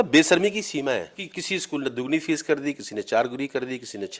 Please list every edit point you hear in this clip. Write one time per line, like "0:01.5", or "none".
0:01.2